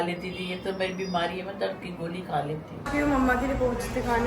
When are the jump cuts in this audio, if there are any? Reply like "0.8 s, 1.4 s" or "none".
2.9 s

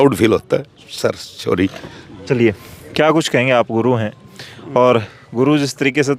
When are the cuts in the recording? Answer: none

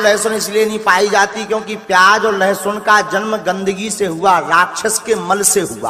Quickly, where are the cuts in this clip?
none

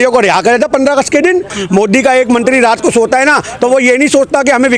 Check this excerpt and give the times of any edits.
1.6 s

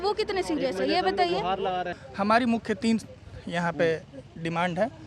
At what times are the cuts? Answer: 2.0 s

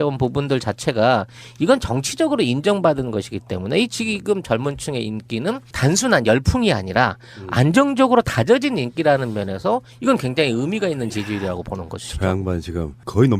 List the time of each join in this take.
5.1 s

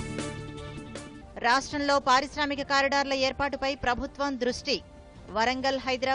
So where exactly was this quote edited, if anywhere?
1.2 s

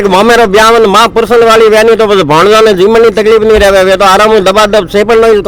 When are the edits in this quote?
none

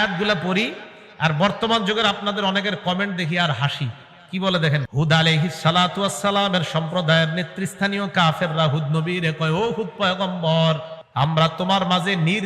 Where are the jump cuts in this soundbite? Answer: 4.9 s, 11.0 s

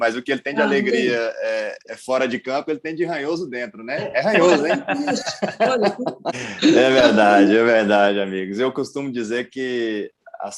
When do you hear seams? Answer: 6.3 s

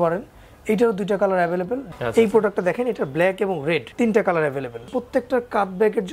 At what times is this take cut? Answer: 1.9 s, 3.9 s, 4.9 s

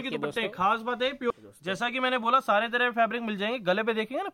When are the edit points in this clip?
1.3 s

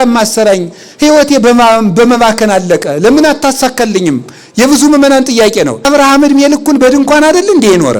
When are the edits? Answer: 5.9 s

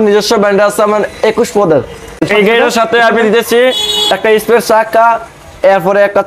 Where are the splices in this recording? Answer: 2.2 s

